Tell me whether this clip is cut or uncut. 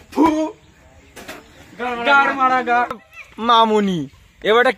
cut